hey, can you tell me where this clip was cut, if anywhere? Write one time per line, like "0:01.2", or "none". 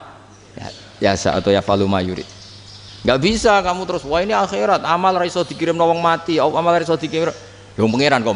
none

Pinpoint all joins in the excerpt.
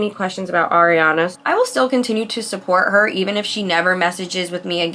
0:01.3

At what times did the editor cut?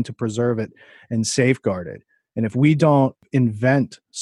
0:03.2

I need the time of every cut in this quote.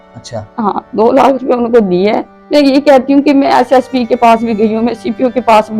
0:02.3

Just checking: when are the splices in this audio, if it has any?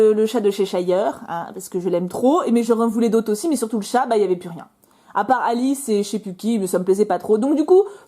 0:05.4

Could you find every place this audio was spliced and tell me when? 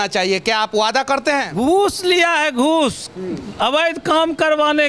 0:01.5

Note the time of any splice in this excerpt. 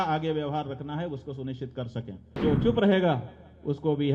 0:02.4

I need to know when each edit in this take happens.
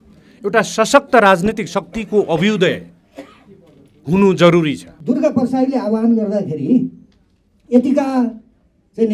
0:04.9

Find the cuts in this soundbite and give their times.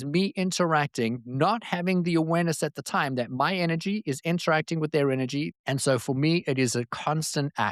0:05.5

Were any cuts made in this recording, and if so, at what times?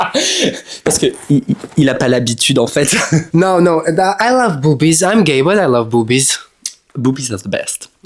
none

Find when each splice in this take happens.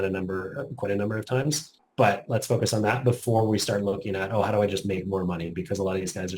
0:01.8

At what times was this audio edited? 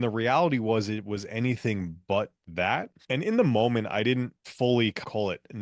none

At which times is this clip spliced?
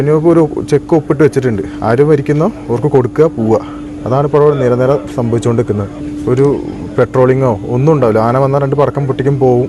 0:06.0

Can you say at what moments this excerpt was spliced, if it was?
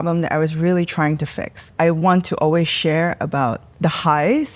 0:01.7
0:03.7

